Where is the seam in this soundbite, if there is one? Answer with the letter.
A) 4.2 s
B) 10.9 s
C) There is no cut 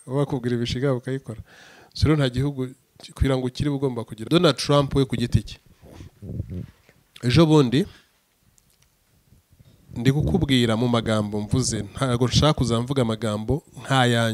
A